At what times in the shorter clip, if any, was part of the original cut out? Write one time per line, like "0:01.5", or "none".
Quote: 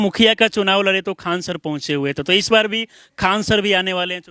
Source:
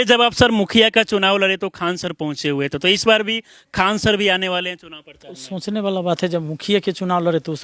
none